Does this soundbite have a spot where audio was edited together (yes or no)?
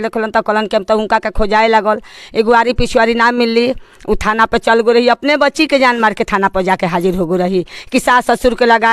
no